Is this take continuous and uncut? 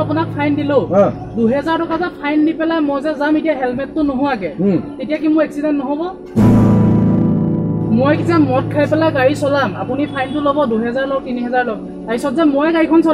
yes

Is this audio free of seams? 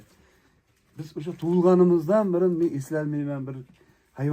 yes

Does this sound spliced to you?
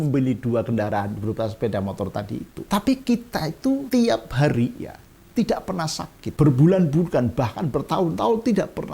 yes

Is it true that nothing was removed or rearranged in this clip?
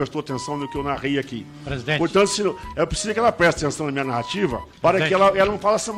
yes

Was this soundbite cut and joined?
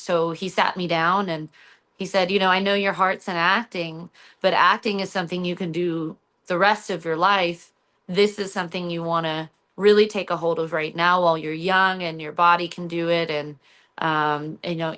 no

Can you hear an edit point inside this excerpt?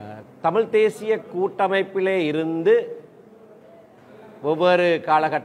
no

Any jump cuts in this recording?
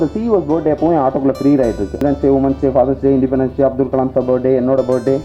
yes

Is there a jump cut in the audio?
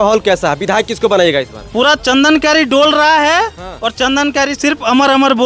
no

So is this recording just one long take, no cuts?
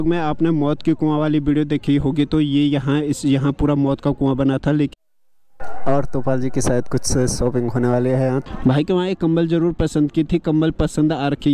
no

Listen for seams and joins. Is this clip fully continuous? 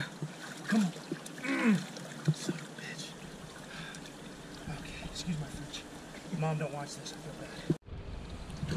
no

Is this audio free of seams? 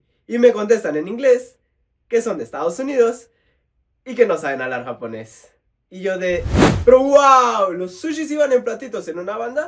no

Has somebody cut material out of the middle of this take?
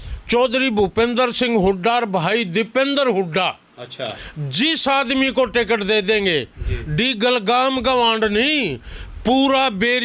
no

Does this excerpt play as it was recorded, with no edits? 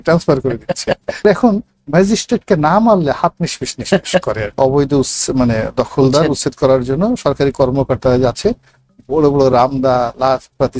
no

